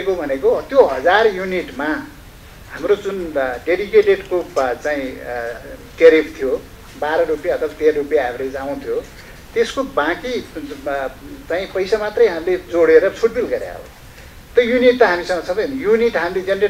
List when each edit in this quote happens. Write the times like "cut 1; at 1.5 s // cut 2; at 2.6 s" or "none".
none